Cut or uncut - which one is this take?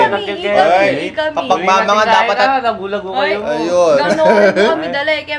uncut